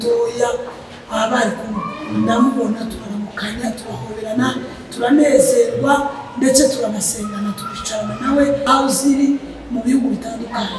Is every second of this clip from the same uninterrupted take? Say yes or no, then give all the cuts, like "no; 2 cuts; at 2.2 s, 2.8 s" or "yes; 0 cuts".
no; 1 cut; at 8.7 s